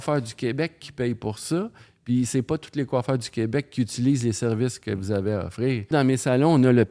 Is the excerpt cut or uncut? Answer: cut